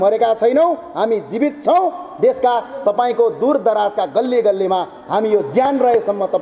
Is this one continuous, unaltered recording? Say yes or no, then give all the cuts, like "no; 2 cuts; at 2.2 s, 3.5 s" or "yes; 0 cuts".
yes; 0 cuts